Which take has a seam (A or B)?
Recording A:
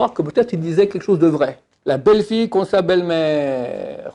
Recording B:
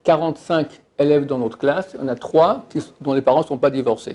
A